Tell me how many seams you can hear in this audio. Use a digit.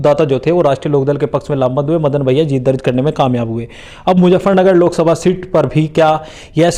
0